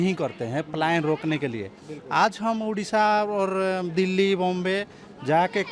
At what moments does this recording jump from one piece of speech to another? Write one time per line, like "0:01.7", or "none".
none